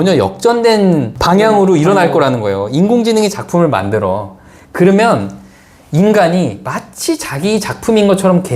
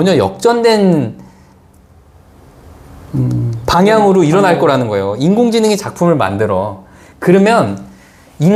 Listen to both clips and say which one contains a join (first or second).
first